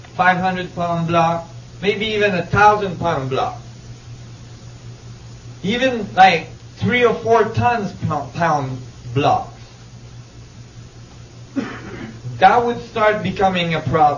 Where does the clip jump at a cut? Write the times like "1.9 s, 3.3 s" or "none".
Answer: 2.0 s